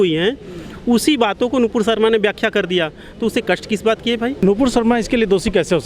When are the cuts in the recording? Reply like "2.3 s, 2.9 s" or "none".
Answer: 4.4 s